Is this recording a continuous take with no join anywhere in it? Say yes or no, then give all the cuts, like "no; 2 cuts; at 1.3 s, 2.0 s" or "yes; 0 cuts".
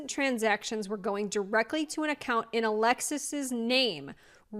yes; 0 cuts